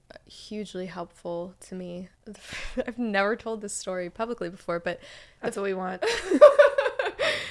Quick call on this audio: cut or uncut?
cut